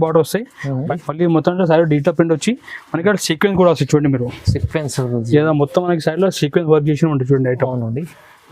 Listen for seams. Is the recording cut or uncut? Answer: cut